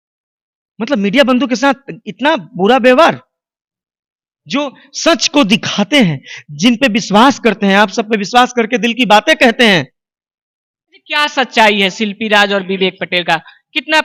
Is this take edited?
no; 0 cuts

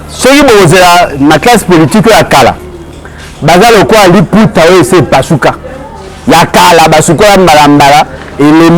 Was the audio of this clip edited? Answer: no; 0 cuts

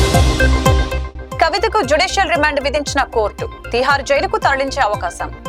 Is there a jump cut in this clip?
yes; 1 cut; at 1.0 s

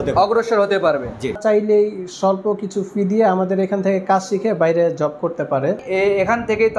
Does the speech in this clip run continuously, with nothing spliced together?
no; 2 cuts; at 1.4 s, 5.8 s

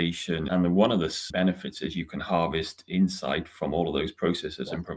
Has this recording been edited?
yes; 1 cut; at 1.2 s

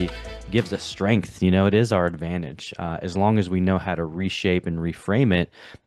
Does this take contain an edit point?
no; 0 cuts

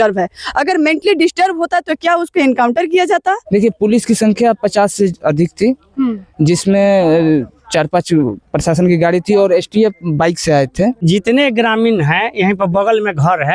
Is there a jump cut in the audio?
yes; 2 cuts; at 3.4 s, 11.0 s

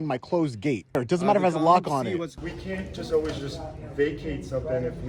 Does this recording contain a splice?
yes; 2 cuts; at 0.9 s, 2.3 s

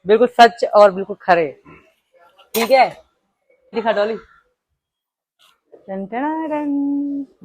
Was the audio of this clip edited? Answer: yes; 1 cut; at 3.7 s

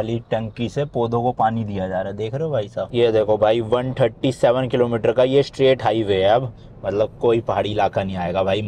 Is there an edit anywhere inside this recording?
yes; 1 cut; at 2.9 s

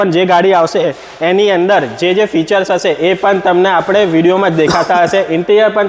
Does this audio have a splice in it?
no; 0 cuts

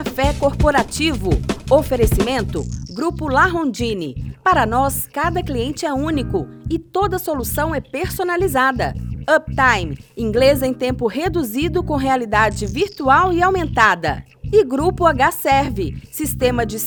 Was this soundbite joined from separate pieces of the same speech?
no; 0 cuts

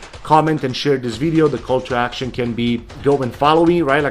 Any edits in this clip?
yes; 1 cut; at 3.0 s

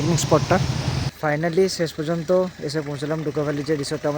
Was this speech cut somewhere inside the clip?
yes; 1 cut; at 1.0 s

